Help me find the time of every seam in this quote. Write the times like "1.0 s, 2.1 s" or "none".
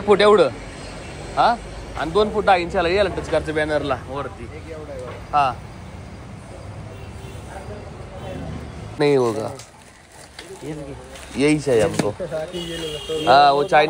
9.0 s